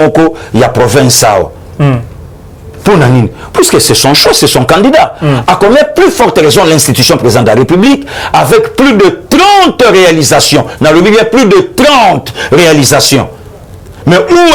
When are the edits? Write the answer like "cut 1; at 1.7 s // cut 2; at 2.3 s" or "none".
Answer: none